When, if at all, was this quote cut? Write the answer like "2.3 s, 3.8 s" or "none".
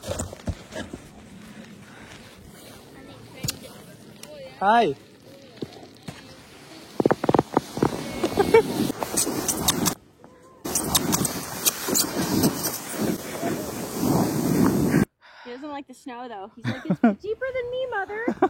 15.0 s